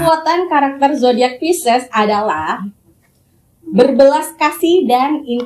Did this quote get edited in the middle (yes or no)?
no